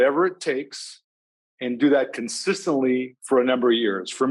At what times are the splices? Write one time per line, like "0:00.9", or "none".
none